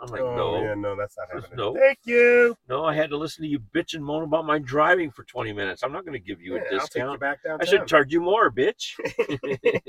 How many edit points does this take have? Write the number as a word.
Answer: zero